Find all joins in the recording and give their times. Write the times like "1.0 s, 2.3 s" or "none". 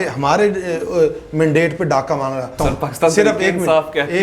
2.5 s